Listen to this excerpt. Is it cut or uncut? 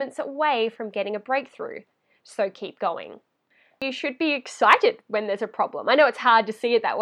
cut